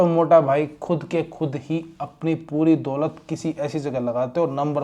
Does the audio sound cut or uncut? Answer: uncut